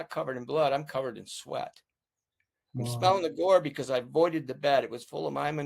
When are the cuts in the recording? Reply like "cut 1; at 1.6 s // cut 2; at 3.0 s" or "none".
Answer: none